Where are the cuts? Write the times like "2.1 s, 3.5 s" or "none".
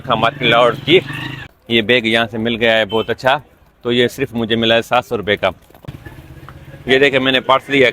1.4 s, 5.8 s

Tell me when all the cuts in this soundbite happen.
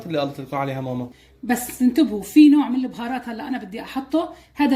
1.2 s

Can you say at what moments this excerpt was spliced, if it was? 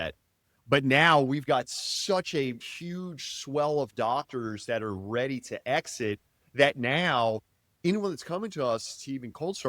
2.6 s, 7.8 s

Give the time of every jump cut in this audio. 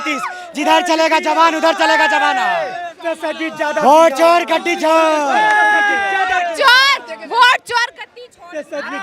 none

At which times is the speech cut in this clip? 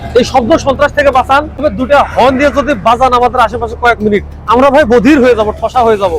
1.6 s

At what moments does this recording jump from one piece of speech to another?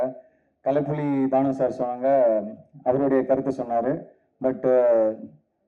none

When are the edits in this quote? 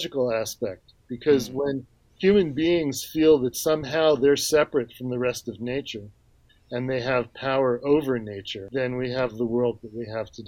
8.6 s

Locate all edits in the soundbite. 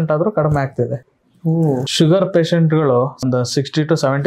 1.6 s, 3.2 s

